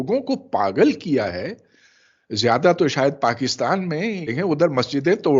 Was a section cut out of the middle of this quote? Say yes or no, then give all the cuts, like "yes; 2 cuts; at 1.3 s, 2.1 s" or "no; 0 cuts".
yes; 1 cut; at 4.2 s